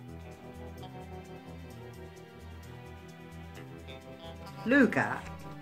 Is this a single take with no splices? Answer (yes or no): no